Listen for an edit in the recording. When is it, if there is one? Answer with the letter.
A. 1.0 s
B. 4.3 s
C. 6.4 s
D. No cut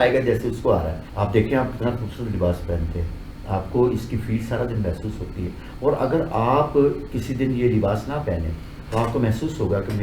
A